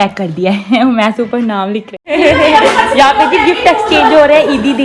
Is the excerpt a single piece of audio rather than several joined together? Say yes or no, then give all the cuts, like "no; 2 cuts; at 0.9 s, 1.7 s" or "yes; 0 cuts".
no; 1 cut; at 2.1 s